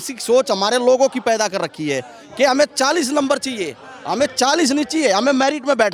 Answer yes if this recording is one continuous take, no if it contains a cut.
yes